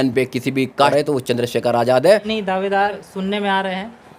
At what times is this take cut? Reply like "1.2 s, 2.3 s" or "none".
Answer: 0.9 s, 2.8 s

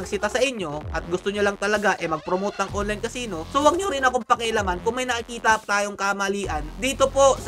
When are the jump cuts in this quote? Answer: 3.4 s

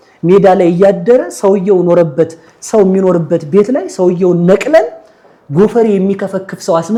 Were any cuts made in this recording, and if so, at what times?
none

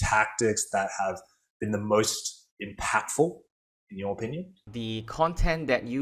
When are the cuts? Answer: 4.7 s

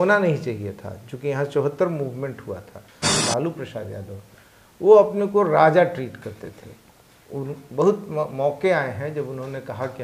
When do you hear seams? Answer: 3.2 s

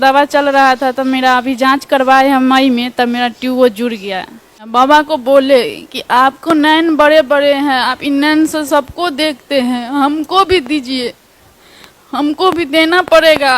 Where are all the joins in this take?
4.6 s

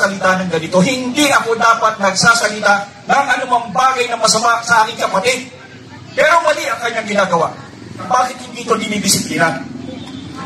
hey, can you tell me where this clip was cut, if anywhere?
8.1 s

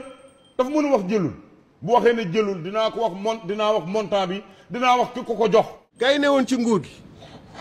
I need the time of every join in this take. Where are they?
5.8 s

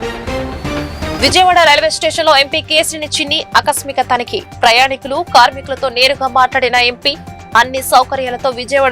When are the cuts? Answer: 1.0 s

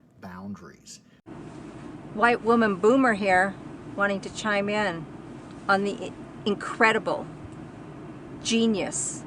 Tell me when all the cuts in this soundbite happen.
1.3 s

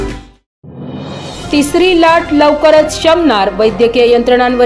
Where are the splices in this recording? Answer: none

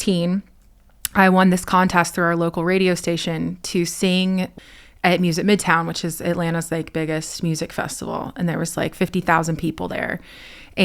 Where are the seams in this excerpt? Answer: 4.5 s

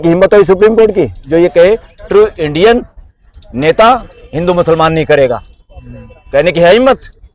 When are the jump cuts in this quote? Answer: none

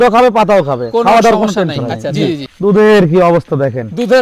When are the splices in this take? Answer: 2.5 s

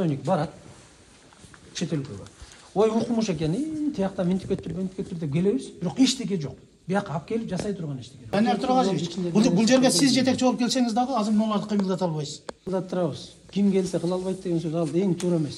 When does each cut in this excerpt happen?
8.3 s, 12.7 s

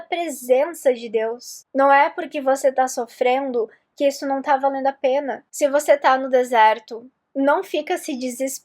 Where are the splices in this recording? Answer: 1.6 s, 5.4 s

